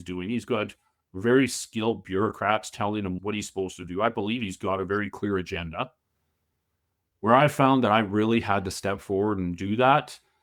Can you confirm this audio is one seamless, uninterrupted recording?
no; 1 cut; at 7.0 s

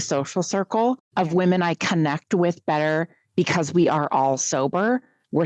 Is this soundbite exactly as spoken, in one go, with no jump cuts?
no; 1 cut; at 1.0 s

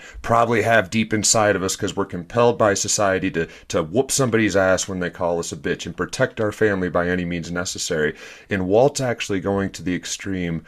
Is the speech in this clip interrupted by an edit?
no; 0 cuts

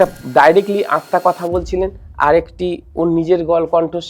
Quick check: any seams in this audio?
no; 0 cuts

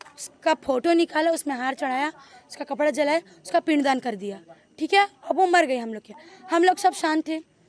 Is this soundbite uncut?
yes; 0 cuts

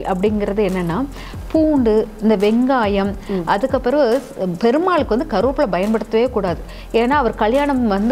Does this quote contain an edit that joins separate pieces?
no; 0 cuts

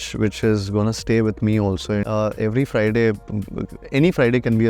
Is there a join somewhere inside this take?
yes; 1 cut; at 2.0 s

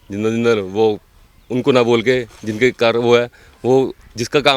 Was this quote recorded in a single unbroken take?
yes; 0 cuts

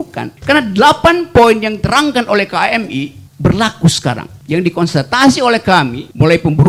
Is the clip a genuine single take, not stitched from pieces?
yes; 0 cuts

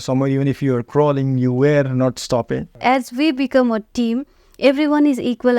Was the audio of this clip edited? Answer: yes; 1 cut; at 2.8 s

